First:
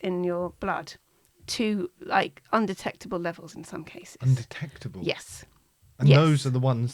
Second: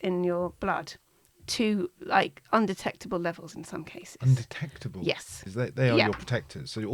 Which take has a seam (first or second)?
second